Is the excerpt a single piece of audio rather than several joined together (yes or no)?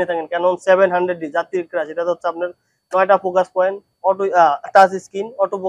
yes